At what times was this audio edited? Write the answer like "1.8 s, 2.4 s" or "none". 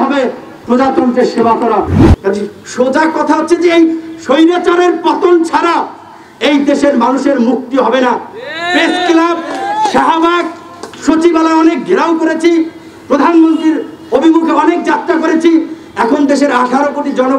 2.0 s